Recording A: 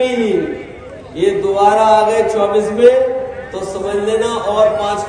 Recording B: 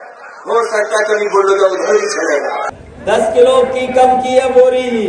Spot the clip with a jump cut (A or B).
B